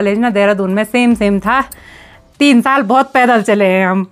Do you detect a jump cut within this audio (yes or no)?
no